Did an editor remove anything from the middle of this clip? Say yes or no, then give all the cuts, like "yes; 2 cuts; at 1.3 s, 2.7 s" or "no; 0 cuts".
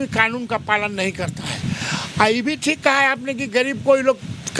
no; 0 cuts